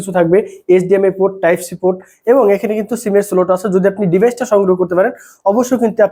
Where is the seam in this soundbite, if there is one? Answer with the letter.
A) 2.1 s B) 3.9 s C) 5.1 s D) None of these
D